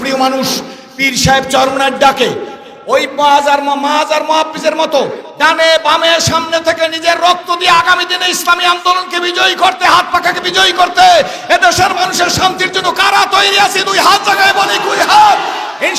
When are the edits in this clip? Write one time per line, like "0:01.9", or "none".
none